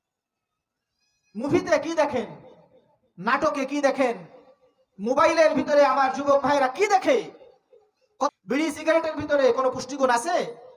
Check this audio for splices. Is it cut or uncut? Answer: cut